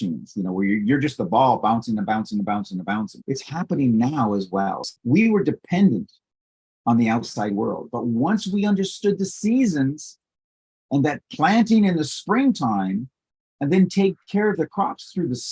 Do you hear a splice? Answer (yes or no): yes